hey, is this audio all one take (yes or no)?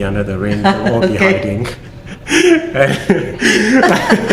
yes